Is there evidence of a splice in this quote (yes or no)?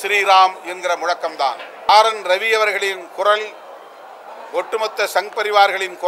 yes